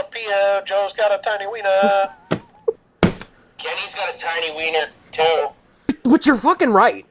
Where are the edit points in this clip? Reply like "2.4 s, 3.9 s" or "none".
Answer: 2.9 s, 6.0 s